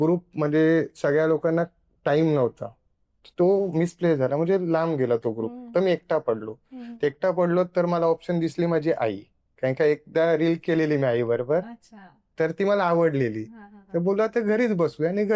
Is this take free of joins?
yes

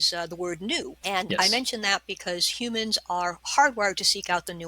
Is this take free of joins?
no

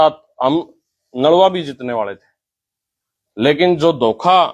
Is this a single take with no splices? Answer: yes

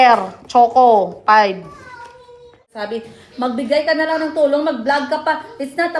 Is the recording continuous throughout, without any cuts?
no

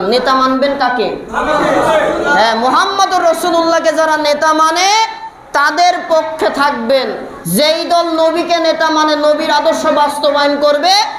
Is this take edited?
no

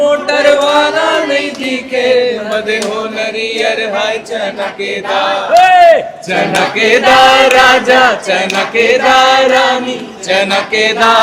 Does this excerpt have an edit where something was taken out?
no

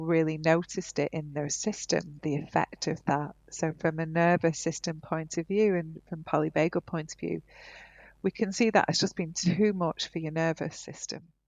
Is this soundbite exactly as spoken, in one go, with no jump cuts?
yes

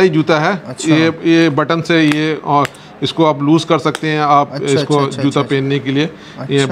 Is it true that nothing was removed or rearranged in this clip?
yes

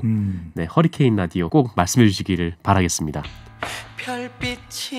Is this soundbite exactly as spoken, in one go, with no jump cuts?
no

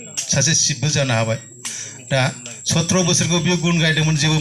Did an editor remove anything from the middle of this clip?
no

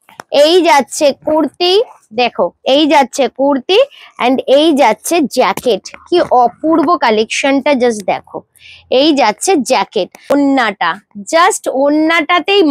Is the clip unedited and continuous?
no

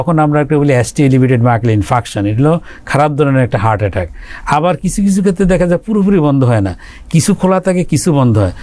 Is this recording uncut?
yes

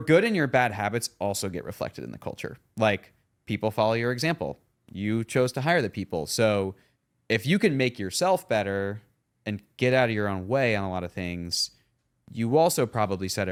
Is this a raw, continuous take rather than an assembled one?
yes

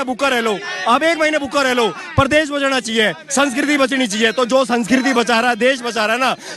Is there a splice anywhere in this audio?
no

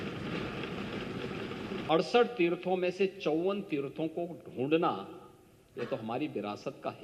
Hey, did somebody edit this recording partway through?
yes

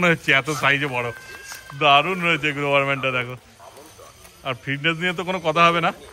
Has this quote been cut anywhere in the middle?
no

